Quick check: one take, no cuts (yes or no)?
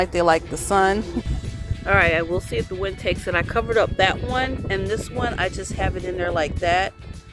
no